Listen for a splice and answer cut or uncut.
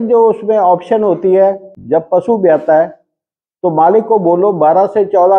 cut